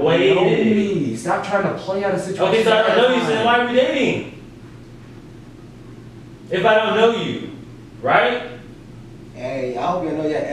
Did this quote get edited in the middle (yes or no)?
no